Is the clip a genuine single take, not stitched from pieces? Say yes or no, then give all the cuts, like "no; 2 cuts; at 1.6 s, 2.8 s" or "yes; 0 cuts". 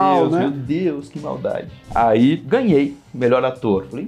no; 1 cut; at 1.7 s